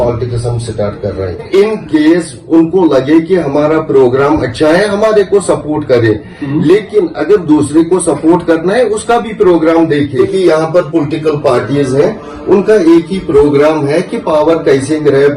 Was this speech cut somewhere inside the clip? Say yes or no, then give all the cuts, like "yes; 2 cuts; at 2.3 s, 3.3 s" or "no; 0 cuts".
yes; 2 cuts; at 1.4 s, 10.1 s